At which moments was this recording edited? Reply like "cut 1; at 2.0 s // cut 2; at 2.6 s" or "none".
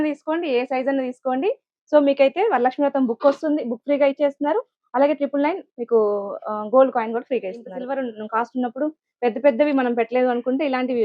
cut 1; at 7.7 s